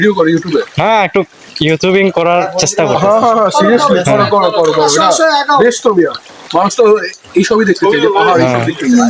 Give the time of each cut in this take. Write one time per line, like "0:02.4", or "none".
none